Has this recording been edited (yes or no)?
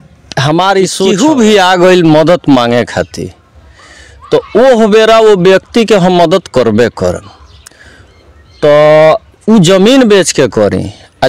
yes